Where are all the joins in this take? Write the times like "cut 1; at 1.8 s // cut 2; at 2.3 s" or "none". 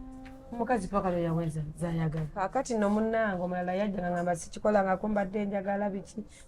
cut 1; at 2.5 s

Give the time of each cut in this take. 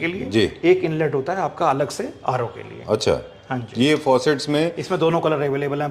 none

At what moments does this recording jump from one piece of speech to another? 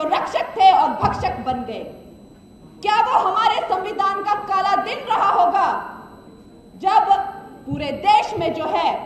none

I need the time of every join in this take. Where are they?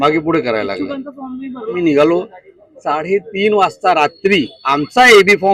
cut 1; at 1.8 s

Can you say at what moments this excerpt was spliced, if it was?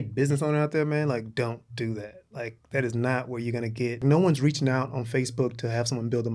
cut 1; at 4.0 s

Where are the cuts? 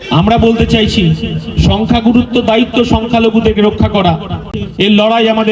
cut 1; at 4.6 s

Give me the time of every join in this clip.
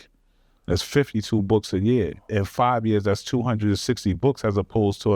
none

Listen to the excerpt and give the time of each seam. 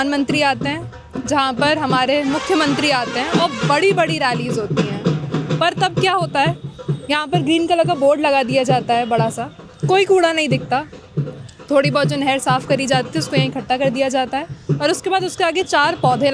none

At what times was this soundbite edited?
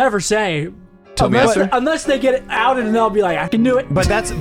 cut 1; at 3.5 s

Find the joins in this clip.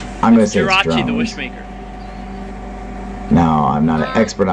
cut 1; at 3.2 s

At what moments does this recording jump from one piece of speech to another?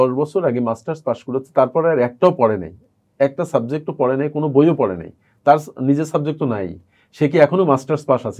none

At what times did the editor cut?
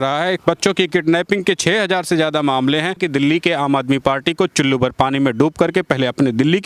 cut 1; at 3.0 s

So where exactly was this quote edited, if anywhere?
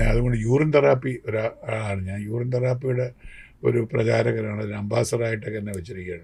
none

